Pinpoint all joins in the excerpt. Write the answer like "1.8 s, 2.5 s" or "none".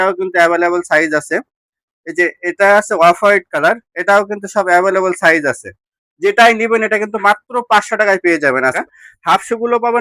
8.8 s